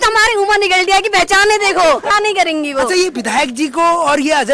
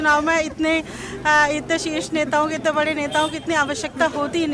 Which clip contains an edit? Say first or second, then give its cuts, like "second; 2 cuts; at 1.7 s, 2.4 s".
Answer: first; 1 cut; at 2.1 s